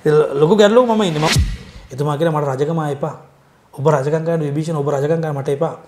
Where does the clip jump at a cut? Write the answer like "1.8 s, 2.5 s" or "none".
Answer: 1.3 s